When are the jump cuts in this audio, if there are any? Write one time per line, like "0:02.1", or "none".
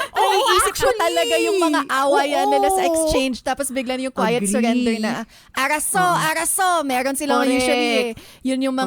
none

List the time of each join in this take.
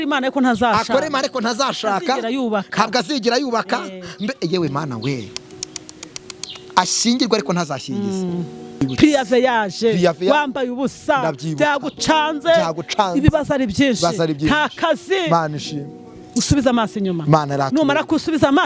0:08.8

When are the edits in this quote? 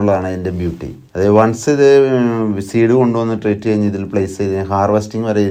none

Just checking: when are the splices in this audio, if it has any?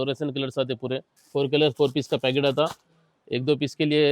0:01.1

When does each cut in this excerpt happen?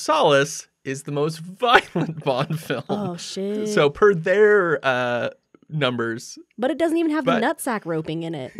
none

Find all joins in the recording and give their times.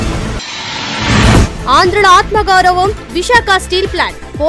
0:01.4

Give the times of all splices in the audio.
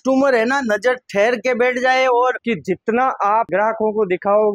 0:02.3

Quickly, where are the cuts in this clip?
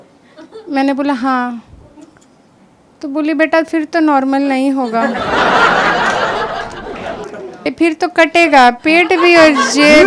0:07.7

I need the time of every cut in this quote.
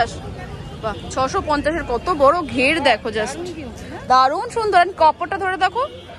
none

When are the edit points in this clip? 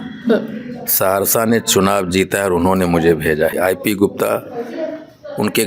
0:03.5

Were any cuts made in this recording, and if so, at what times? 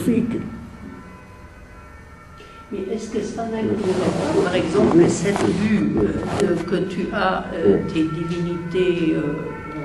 0:05.0

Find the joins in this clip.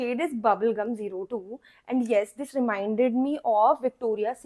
none

